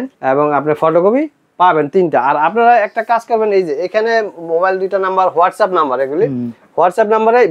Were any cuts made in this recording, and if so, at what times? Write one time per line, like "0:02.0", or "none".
none